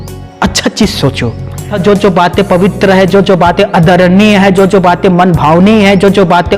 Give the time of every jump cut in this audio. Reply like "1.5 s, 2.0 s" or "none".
1.7 s